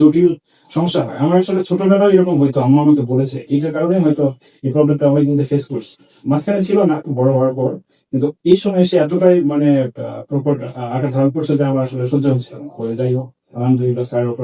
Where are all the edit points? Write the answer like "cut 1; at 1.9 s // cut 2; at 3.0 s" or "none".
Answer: none